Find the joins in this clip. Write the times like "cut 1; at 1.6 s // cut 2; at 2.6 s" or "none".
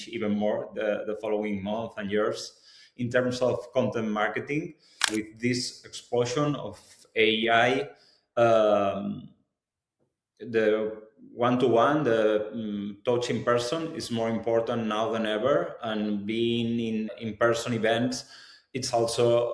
cut 1; at 5.0 s